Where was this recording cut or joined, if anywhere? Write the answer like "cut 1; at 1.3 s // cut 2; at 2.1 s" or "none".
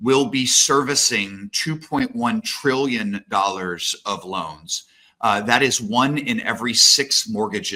none

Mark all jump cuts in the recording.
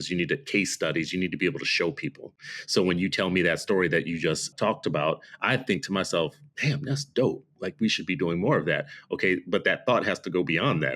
cut 1; at 4.5 s

